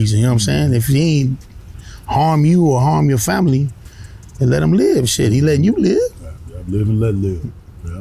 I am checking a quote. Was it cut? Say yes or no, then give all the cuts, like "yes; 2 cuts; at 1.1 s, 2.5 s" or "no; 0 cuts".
no; 0 cuts